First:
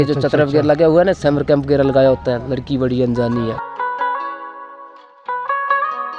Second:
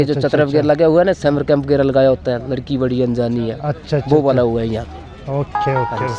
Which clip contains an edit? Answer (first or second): first